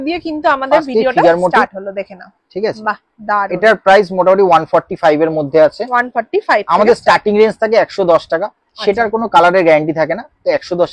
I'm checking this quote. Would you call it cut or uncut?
uncut